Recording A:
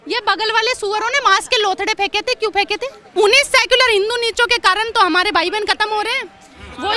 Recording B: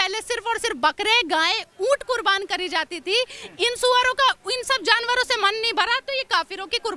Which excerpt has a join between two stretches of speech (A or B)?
A